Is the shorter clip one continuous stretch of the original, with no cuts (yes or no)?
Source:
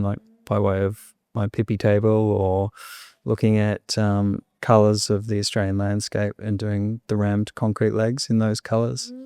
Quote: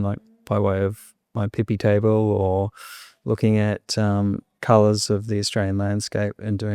yes